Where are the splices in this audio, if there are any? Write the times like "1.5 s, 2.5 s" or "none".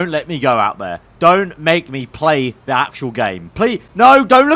none